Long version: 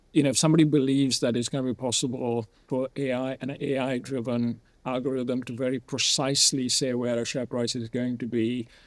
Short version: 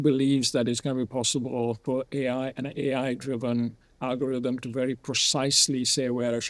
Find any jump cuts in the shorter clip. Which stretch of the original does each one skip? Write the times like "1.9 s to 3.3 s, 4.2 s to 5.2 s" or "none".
2.5 s to 2.6 s